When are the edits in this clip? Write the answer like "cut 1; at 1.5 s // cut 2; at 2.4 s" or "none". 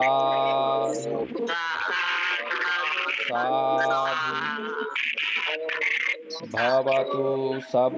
none